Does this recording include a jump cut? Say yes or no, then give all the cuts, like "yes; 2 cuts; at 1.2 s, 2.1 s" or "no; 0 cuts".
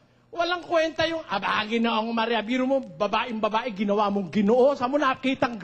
no; 0 cuts